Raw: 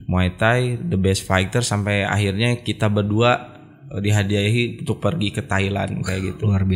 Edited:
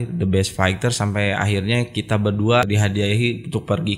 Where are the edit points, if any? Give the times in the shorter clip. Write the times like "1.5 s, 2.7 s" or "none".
2.7 s